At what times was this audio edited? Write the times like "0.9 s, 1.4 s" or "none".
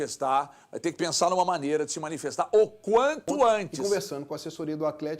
3.7 s